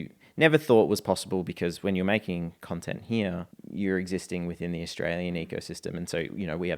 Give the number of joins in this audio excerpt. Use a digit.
1